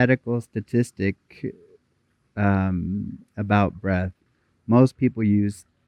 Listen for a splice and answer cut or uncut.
uncut